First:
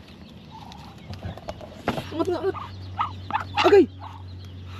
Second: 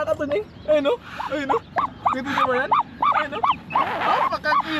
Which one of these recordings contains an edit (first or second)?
first